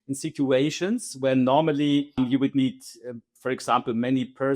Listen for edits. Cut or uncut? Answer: cut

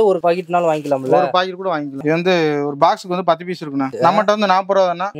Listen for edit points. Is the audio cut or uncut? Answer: cut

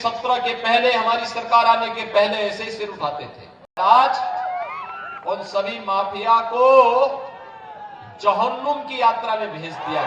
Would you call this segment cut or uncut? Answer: cut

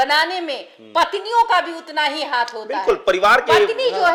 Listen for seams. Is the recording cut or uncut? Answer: uncut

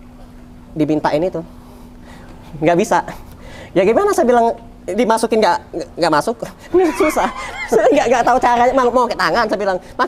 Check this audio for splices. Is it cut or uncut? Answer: uncut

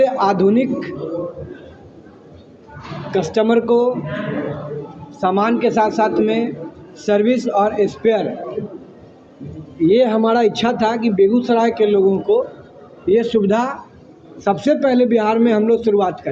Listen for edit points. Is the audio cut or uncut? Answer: uncut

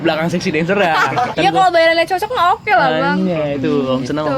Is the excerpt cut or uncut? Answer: cut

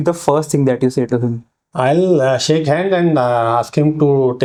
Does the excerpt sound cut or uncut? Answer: uncut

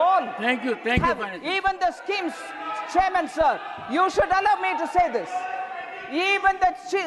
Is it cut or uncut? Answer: uncut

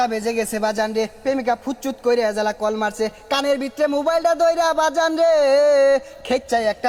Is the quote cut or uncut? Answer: uncut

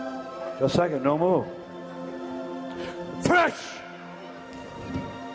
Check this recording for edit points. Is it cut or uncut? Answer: uncut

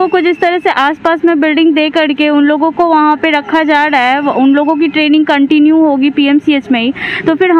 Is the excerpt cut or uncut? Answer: uncut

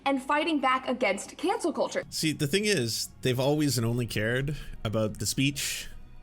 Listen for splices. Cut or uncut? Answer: cut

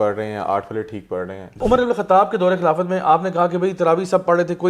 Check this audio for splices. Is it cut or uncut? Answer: cut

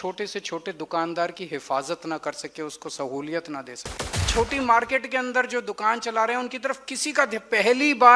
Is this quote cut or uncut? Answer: cut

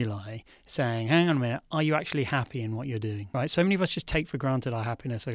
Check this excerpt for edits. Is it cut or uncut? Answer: cut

